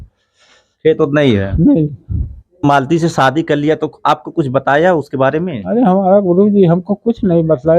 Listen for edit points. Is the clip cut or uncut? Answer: cut